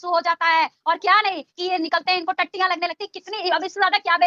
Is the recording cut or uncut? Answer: uncut